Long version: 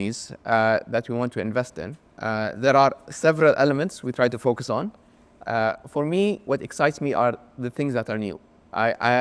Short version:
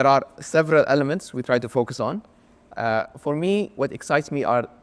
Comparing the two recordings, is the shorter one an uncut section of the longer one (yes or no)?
yes